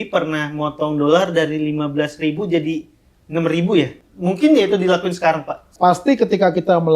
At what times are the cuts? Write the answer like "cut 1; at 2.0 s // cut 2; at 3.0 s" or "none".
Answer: cut 1; at 4.0 s // cut 2; at 5.7 s